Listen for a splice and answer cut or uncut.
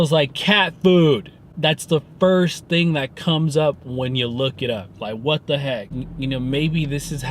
cut